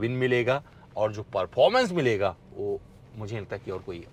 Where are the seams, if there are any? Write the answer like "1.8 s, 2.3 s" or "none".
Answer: none